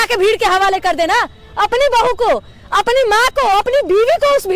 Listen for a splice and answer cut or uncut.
uncut